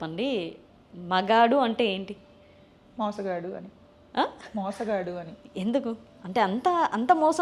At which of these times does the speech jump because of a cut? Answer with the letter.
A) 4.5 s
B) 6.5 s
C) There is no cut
C